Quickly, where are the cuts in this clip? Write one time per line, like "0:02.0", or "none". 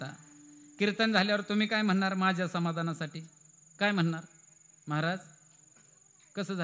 none